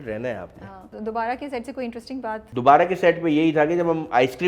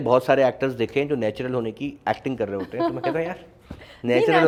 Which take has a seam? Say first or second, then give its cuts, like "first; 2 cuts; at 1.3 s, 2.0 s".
first; 2 cuts; at 0.9 s, 2.5 s